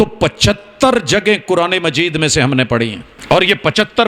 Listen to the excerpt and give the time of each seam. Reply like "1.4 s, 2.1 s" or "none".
3.1 s